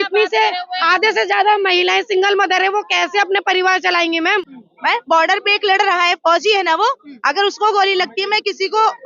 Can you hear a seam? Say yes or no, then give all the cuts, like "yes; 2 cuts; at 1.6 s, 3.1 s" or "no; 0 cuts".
yes; 1 cut; at 4.2 s